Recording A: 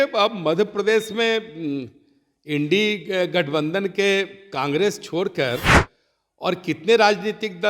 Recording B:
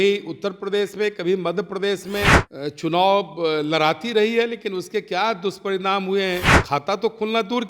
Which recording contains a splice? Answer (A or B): B